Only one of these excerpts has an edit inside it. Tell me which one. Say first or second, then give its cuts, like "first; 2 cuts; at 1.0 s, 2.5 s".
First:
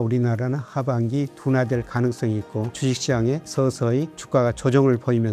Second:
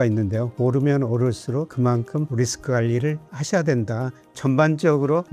second; 1 cut; at 4.2 s